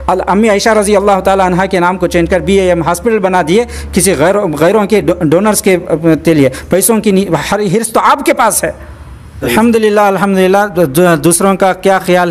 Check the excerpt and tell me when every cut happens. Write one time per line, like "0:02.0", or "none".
0:09.4